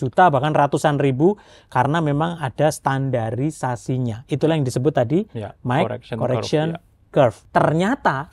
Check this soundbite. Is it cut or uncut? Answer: cut